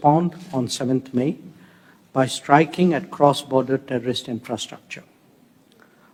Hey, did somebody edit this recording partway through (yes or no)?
no